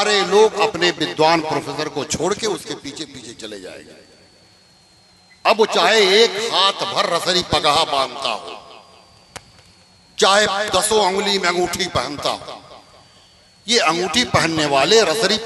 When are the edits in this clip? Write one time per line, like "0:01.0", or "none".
none